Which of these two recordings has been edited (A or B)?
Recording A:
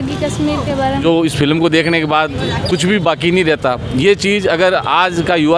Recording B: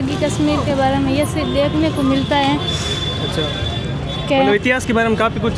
A